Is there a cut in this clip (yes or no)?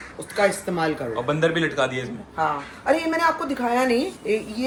no